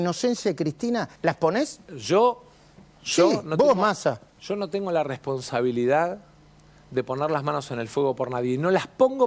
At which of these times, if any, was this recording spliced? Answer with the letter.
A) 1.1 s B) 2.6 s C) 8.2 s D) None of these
A